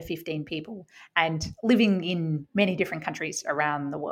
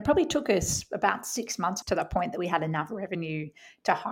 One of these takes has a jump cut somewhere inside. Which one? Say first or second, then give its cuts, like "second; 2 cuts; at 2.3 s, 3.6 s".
second; 1 cut; at 1.8 s